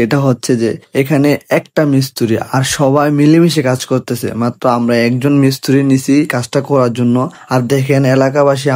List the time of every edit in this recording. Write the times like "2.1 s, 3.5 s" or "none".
none